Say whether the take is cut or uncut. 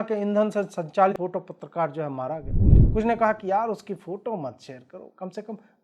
cut